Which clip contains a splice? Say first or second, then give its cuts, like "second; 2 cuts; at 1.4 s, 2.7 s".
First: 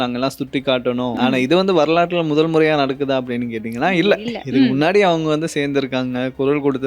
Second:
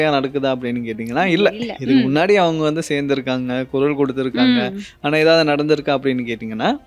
first; 1 cut; at 1.1 s